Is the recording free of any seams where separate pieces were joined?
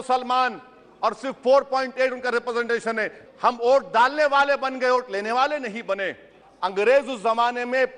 no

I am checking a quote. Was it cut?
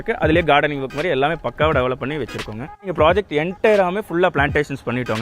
yes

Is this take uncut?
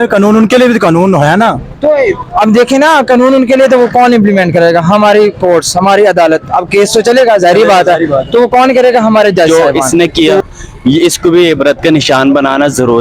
no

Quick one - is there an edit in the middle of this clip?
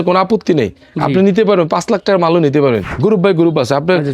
yes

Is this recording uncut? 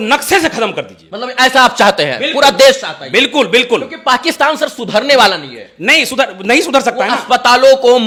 yes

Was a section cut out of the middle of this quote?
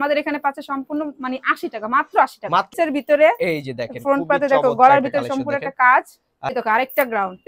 yes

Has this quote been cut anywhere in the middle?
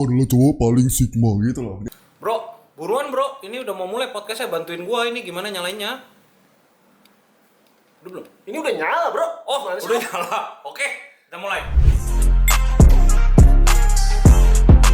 yes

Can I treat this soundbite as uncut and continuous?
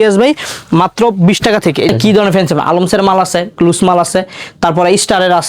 no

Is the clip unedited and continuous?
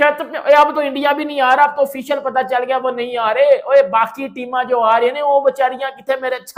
yes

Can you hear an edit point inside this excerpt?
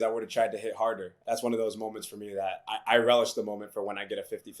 yes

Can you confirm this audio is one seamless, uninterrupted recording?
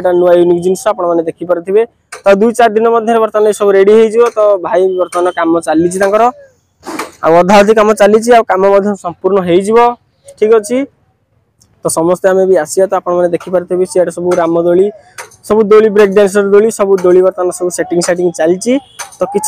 yes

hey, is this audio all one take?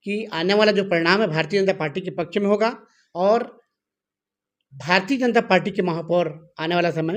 yes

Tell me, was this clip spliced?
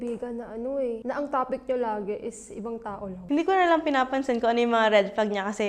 yes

